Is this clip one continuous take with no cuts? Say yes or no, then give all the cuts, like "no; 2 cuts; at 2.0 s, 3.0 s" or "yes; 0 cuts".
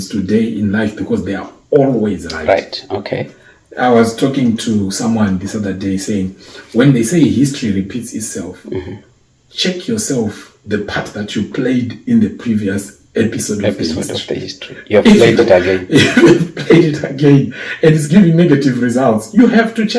yes; 0 cuts